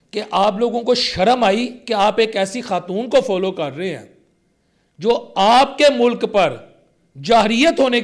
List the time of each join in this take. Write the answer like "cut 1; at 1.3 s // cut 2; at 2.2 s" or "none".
none